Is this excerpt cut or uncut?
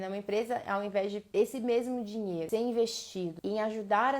cut